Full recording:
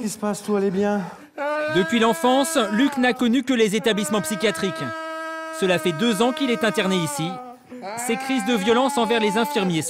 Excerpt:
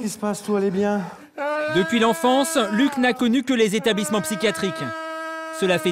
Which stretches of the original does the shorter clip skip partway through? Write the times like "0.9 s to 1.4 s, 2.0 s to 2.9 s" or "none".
none